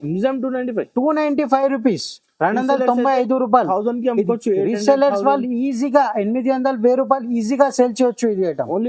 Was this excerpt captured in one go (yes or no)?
yes